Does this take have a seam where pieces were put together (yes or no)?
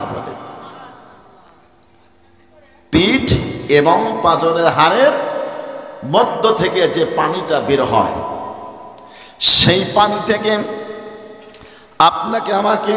no